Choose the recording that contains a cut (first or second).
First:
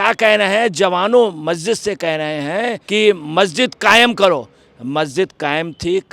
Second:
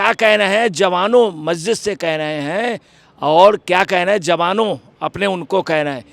first